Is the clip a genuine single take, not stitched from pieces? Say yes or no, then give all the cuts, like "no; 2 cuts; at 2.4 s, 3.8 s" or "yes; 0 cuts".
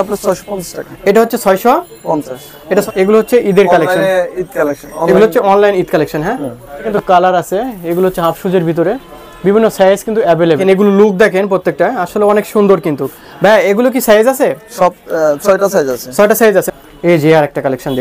no; 4 cuts; at 2.8 s, 6.9 s, 10.6 s, 16.7 s